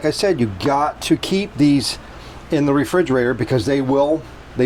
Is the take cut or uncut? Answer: uncut